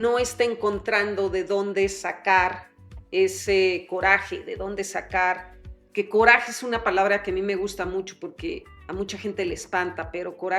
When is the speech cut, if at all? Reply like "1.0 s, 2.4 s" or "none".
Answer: none